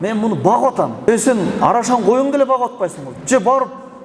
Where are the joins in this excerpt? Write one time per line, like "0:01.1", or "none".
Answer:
0:01.1
0:03.1